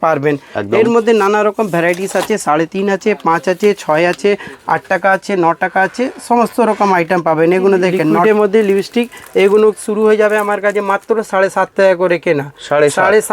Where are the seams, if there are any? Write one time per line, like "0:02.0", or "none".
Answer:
0:08.2